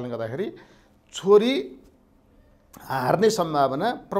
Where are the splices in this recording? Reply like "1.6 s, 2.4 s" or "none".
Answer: none